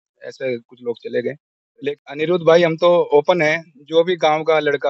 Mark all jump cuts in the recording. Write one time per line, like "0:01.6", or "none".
0:01.9